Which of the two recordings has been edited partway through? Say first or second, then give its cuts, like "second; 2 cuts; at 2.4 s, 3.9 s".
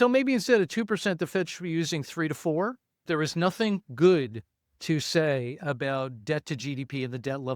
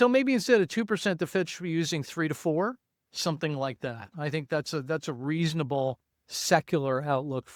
first; 1 cut; at 3.0 s